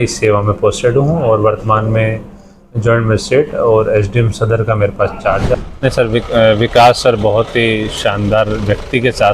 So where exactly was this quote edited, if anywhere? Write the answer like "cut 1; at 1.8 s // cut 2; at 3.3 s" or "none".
cut 1; at 5.6 s